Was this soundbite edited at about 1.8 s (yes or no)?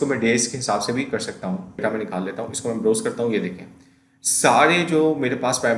yes